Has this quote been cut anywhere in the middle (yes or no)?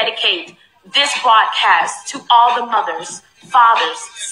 no